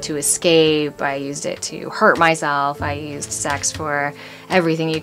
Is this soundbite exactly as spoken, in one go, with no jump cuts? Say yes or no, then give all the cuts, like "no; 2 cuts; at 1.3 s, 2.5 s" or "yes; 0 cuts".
yes; 0 cuts